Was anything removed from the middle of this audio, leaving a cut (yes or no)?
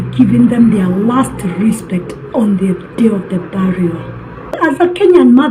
yes